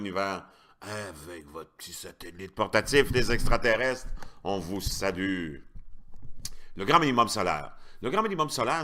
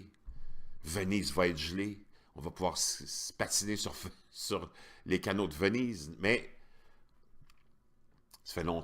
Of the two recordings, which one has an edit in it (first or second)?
second